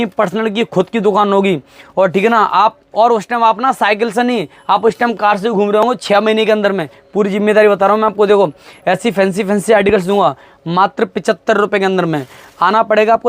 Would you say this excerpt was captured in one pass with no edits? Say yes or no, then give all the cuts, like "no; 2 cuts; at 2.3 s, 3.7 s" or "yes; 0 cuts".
yes; 0 cuts